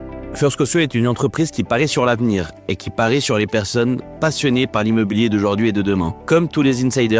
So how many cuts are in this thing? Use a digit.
1